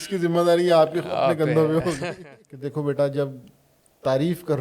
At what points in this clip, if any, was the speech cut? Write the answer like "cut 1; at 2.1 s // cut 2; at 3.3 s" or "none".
cut 1; at 2.1 s